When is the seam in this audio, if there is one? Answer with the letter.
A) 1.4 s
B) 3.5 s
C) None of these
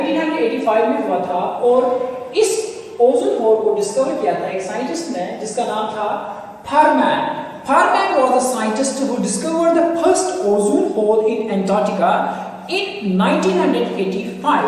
A